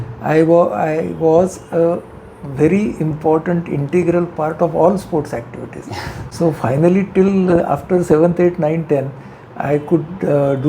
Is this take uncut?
yes; 0 cuts

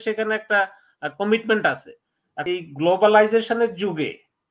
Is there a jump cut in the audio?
yes; 1 cut; at 2.4 s

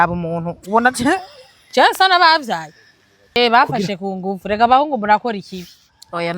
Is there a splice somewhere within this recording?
yes; 1 cut; at 3.4 s

